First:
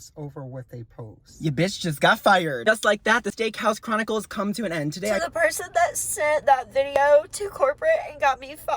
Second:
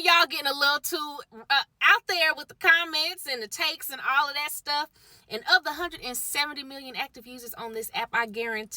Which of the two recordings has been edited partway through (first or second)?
first